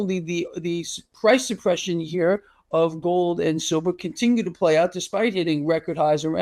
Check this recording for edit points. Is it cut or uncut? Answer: uncut